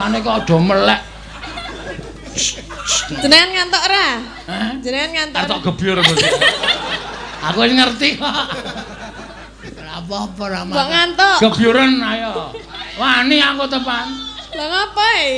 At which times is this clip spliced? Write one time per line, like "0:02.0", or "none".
none